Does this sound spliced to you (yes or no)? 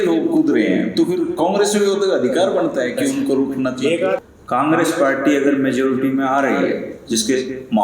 yes